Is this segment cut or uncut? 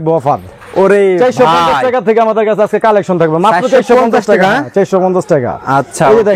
uncut